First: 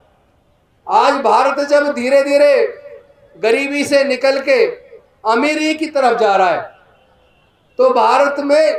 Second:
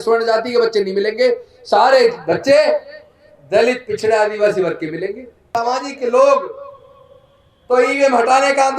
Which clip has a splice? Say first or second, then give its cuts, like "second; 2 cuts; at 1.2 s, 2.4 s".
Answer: second; 1 cut; at 5.5 s